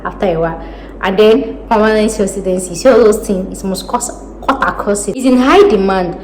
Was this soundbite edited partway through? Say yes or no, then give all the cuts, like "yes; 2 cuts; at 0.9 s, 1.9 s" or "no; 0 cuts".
yes; 1 cut; at 5.2 s